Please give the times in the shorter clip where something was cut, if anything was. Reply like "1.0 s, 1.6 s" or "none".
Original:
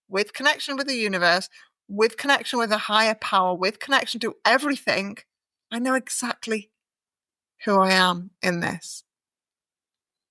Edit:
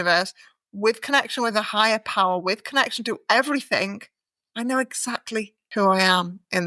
5.6 s